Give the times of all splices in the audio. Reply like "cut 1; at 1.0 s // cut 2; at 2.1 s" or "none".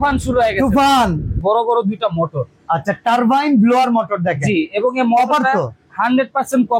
cut 1; at 1.4 s